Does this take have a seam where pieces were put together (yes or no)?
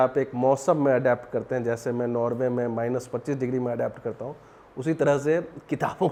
no